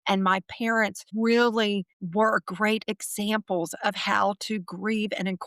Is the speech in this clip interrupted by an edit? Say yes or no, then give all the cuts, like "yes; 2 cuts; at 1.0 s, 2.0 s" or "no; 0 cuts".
yes; 2 cuts; at 1.0 s, 2.0 s